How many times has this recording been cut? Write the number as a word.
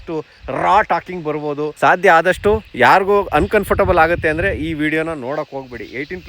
one